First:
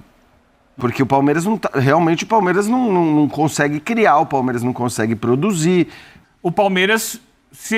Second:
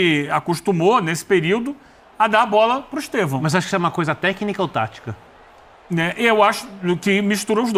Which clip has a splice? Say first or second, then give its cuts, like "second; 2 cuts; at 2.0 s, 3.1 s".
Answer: first; 2 cuts; at 0.8 s, 6.1 s